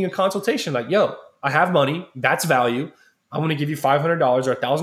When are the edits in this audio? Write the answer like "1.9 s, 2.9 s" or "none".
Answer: none